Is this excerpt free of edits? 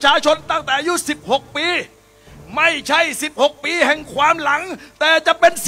yes; 0 cuts

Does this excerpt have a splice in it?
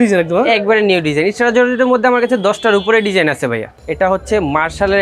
yes; 1 cut; at 3.8 s

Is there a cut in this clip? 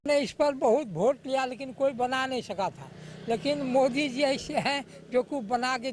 no; 0 cuts

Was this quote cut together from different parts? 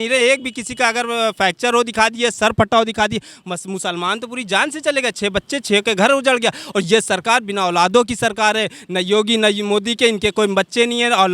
no; 0 cuts

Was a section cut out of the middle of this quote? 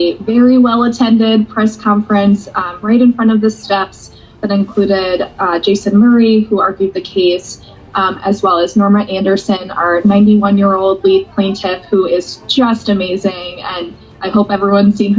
no; 0 cuts

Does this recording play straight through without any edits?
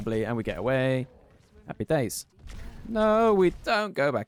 yes; 0 cuts

